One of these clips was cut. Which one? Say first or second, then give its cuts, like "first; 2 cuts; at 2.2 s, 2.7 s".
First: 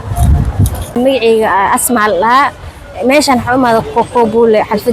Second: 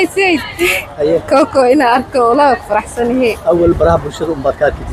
first; 1 cut; at 1.0 s